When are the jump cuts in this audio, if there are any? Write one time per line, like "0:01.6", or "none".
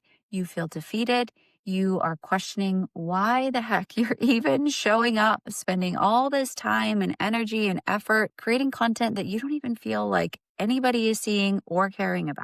none